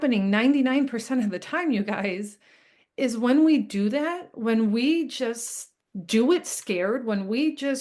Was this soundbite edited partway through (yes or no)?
no